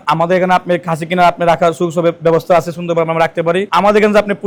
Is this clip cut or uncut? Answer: uncut